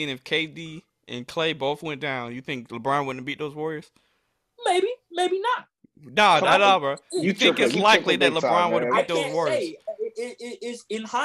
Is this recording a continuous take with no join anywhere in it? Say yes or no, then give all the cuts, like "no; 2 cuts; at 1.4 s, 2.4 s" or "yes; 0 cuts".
yes; 0 cuts